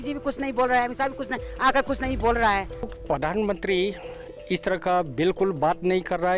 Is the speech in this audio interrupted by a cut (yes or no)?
yes